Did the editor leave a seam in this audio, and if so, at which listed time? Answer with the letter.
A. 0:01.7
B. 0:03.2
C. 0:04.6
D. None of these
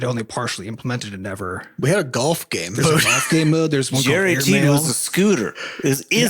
A